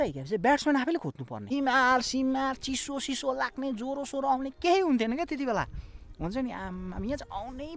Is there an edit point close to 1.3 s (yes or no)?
yes